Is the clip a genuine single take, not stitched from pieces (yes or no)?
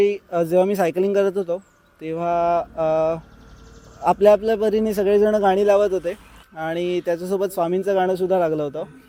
yes